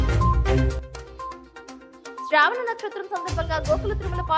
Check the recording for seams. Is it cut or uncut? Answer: uncut